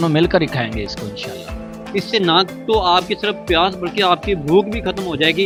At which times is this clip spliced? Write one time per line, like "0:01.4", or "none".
none